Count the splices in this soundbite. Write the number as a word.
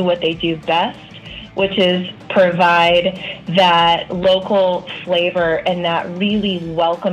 zero